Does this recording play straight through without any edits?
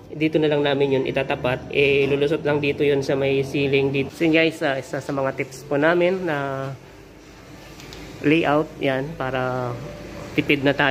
no; 1 cut; at 4.1 s

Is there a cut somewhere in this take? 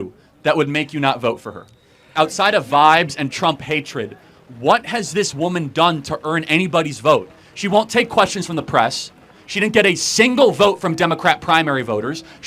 yes; 1 cut; at 2.1 s

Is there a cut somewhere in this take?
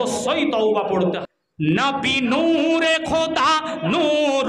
yes; 1 cut; at 1.2 s

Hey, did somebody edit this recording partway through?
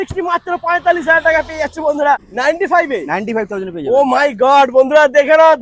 yes; 1 cut; at 2.3 s

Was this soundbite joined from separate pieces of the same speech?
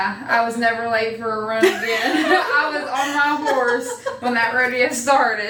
no; 0 cuts

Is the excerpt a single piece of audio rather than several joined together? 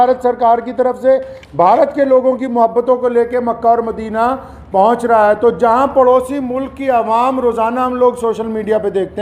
yes; 0 cuts

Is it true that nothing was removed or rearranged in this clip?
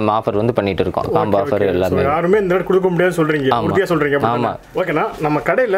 no; 1 cut; at 4.7 s

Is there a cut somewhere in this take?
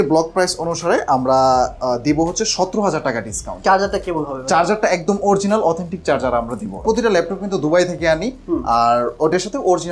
yes; 2 cuts; at 3.6 s, 6.8 s

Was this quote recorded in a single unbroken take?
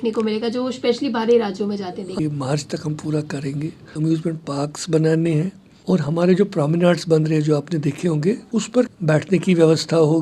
no; 4 cuts; at 2.2 s, 3.9 s, 5.7 s, 8.4 s

